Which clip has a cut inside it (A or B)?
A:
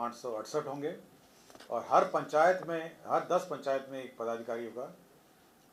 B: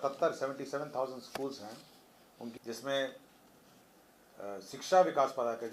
B